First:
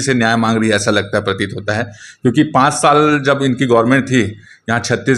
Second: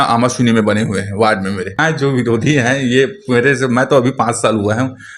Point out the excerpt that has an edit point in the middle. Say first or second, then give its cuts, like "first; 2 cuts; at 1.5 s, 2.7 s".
second; 1 cut; at 1.8 s